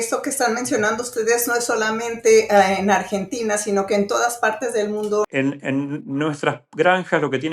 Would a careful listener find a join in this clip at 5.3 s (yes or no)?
yes